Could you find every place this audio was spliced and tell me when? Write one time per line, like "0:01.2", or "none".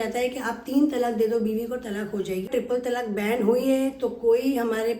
0:02.5